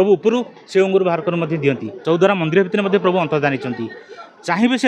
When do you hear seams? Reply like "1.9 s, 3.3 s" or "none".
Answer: 1.9 s